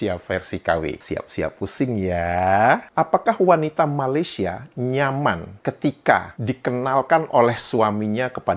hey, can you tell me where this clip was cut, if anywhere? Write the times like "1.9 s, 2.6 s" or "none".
2.8 s